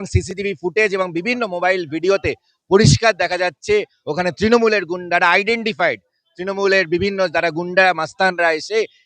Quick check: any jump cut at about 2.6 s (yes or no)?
no